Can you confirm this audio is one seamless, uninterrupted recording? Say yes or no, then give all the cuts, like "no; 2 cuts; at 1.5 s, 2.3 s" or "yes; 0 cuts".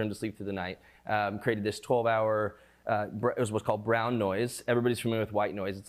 yes; 0 cuts